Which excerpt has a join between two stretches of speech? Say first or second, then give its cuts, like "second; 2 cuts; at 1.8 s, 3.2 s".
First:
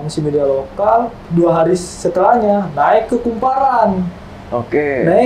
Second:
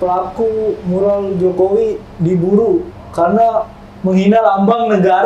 first; 1 cut; at 1.2 s